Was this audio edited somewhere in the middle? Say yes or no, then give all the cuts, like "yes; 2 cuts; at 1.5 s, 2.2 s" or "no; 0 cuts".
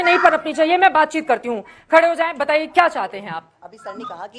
no; 0 cuts